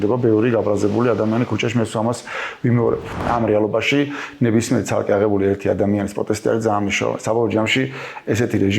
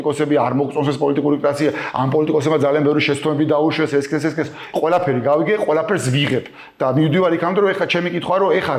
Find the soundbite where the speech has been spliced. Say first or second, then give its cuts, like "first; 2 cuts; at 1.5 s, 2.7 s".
first; 1 cut; at 3.2 s